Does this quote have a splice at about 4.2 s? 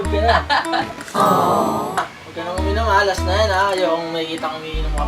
no; 1 cut; at 2.2 s

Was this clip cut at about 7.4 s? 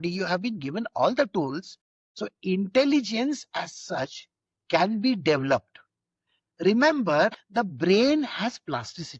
yes; 1 cut; at 7.4 s

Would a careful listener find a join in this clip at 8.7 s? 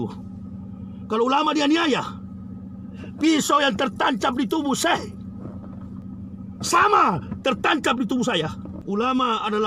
yes; 1 cut; at 8.7 s

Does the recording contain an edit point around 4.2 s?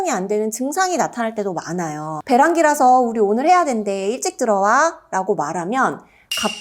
no; 1 cut; at 2.1 s

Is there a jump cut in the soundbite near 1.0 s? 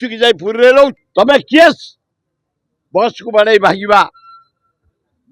yes; 1 cut; at 1.0 s

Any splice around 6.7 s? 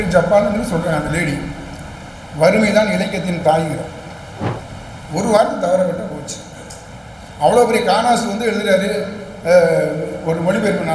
no; 1 cut; at 4.6 s

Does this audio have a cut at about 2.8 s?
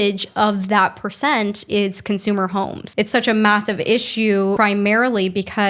yes; 2 cuts; at 2.8 s, 4.6 s

